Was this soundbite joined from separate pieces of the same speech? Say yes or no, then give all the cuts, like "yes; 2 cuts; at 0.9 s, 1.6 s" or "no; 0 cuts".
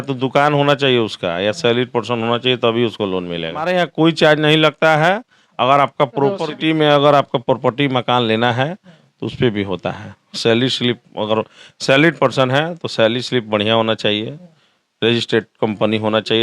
yes; 2 cuts; at 3.7 s, 6.4 s